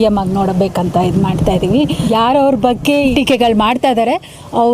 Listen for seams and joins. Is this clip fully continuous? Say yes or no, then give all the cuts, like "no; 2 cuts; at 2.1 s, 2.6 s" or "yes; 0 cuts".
no; 2 cuts; at 2.0 s, 3.1 s